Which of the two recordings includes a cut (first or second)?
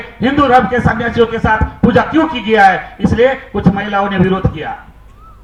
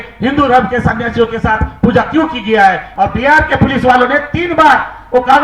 second